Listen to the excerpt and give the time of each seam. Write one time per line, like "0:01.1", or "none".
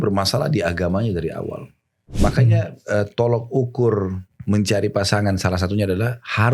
0:02.1